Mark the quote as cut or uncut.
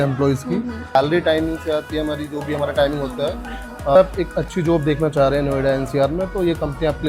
cut